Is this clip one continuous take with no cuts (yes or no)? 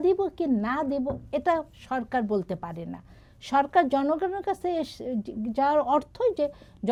yes